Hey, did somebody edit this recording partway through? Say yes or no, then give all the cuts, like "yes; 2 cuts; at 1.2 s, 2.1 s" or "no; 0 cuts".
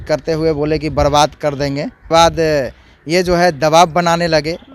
yes; 1 cut; at 2.1 s